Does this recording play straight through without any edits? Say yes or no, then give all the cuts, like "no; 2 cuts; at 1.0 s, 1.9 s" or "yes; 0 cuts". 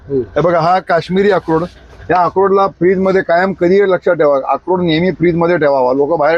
yes; 0 cuts